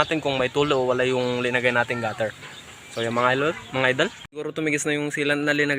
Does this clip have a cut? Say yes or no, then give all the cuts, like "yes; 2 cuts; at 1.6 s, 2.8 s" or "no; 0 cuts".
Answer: yes; 1 cut; at 4.0 s